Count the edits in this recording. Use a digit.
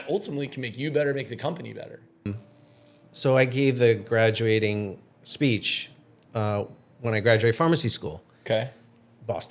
1